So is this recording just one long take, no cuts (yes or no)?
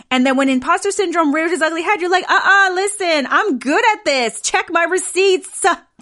yes